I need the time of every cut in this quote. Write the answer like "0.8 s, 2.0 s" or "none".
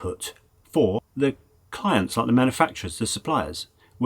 1.1 s